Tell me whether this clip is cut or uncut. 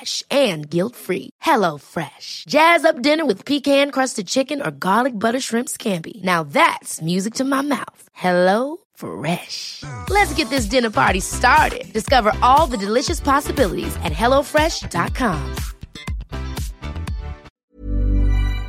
cut